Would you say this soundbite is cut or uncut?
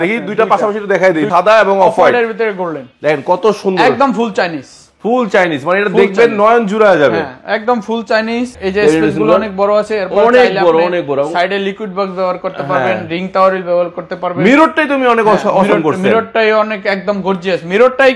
cut